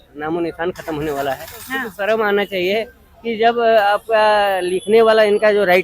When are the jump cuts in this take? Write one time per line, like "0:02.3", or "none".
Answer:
0:01.8